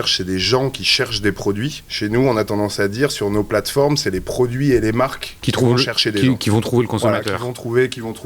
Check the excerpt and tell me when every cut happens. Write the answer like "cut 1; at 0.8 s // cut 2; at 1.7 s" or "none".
cut 1; at 1.8 s